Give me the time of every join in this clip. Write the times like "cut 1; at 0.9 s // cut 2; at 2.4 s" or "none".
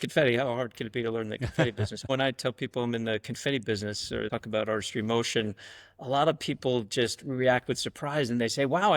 cut 1; at 2.1 s // cut 2; at 4.3 s

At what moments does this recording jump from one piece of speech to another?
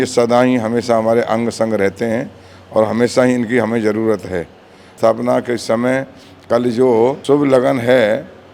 cut 1; at 4.9 s // cut 2; at 7.2 s

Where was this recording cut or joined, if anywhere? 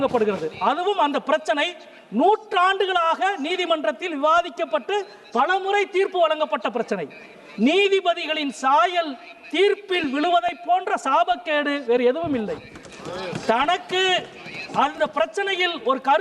none

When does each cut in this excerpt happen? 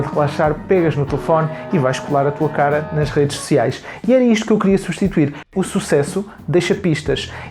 cut 1; at 5.5 s

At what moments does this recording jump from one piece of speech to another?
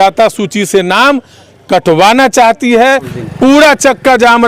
cut 1; at 3.1 s

